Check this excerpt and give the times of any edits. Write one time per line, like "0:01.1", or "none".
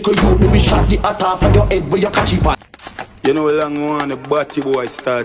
0:02.5